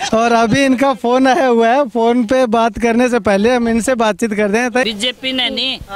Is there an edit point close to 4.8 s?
yes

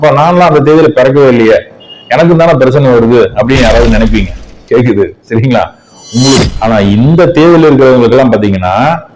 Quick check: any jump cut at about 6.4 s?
yes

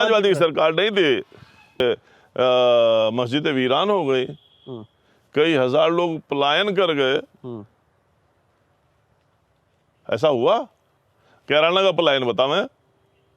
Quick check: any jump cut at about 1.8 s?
yes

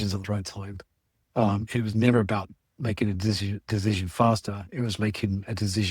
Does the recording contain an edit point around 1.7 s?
yes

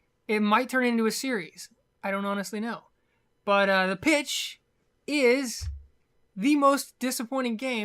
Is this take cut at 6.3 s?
no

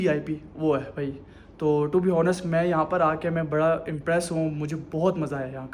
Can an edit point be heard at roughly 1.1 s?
no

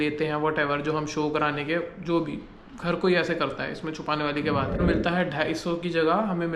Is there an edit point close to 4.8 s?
yes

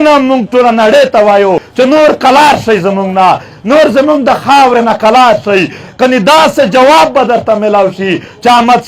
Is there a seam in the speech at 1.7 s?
yes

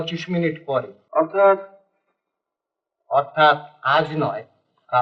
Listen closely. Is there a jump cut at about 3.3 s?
no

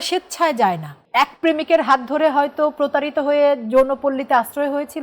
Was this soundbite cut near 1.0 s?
yes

